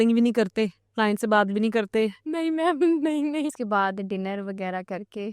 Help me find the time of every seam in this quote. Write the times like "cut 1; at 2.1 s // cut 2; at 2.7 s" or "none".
cut 1; at 3.6 s